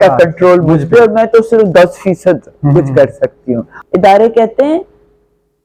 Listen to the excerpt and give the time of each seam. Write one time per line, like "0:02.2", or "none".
0:03.7